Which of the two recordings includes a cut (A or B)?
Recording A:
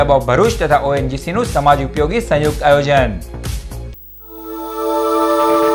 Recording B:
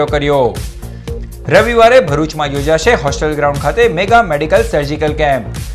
A